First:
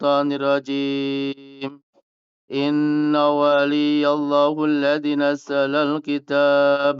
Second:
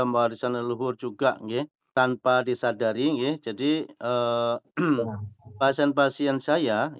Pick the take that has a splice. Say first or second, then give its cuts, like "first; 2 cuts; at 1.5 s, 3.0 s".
second; 1 cut; at 1.9 s